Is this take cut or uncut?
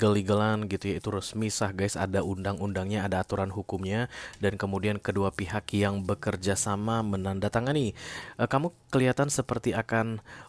cut